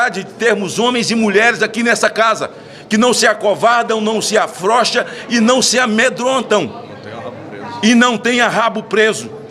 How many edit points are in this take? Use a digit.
0